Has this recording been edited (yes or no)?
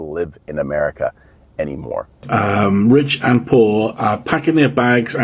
yes